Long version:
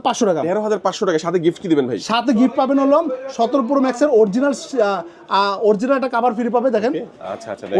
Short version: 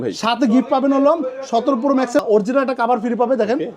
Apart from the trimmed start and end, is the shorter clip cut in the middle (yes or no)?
yes